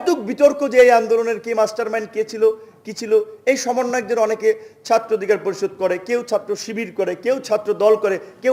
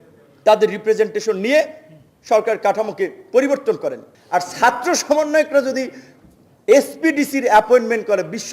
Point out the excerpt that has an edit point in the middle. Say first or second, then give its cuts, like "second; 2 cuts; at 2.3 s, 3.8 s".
second; 1 cut; at 4.1 s